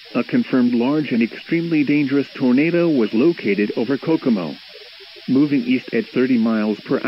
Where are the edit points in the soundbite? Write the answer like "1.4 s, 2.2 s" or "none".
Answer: 1.0 s, 2.9 s